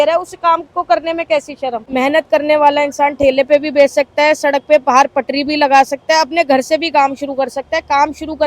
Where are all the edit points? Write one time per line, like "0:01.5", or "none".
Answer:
0:01.8